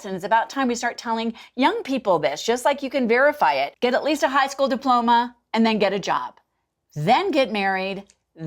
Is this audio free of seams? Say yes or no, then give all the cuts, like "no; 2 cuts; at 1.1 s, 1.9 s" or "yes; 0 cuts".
no; 1 cut; at 3.7 s